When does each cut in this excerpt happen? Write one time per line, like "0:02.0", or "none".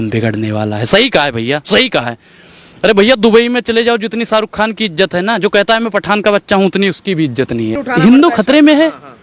0:07.8